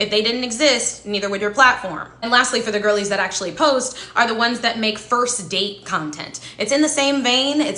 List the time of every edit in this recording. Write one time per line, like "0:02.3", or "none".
0:02.5